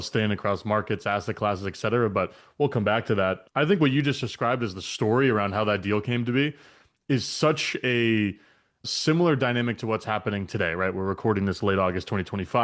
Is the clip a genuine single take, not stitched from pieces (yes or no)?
yes